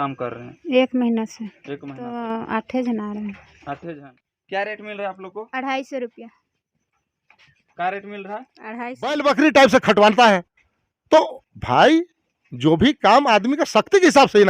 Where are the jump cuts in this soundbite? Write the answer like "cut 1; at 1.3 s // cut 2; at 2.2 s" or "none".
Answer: cut 1; at 2.2 s // cut 2; at 3.8 s // cut 3; at 9.2 s